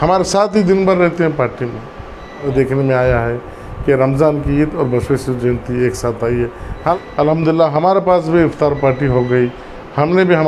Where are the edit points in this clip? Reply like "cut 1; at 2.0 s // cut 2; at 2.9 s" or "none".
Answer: cut 1; at 2.5 s // cut 2; at 7.0 s